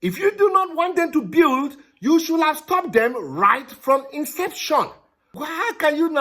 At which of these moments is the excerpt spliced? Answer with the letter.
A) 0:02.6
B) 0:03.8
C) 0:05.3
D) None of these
C